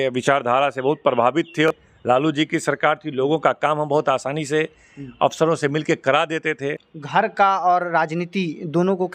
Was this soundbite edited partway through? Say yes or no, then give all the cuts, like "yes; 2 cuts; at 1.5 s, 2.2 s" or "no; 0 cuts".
yes; 2 cuts; at 1.7 s, 6.9 s